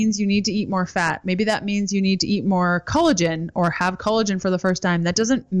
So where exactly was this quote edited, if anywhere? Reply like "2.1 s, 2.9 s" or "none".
none